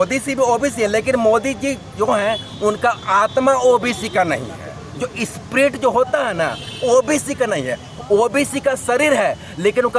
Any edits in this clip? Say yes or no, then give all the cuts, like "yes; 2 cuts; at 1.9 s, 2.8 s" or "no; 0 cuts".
no; 0 cuts